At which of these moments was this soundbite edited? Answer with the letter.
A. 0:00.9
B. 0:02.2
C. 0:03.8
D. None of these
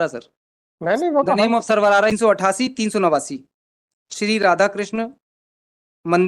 B